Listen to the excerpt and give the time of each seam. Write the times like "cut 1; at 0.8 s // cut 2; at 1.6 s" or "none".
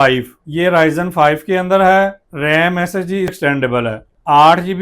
cut 1; at 3.4 s